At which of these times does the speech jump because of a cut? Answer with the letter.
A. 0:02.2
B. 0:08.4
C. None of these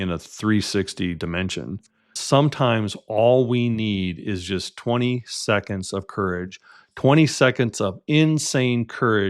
A